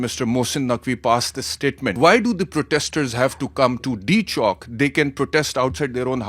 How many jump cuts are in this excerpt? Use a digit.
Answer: 1